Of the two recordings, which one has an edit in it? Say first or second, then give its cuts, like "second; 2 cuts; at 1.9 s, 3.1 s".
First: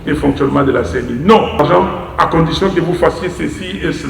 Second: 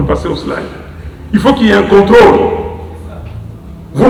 first; 1 cut; at 1.6 s